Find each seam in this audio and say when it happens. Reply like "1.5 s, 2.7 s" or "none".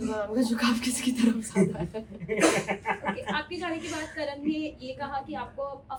none